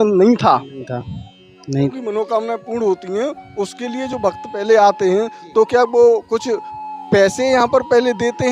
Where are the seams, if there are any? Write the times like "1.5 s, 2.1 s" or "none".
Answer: 1.6 s